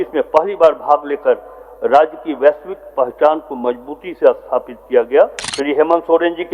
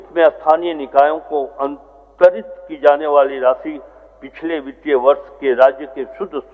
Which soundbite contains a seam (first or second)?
first